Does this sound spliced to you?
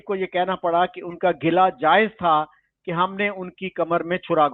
no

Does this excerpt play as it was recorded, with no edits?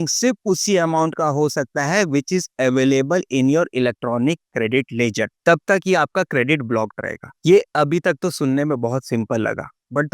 no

